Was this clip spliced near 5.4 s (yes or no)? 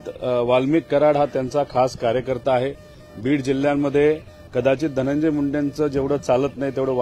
no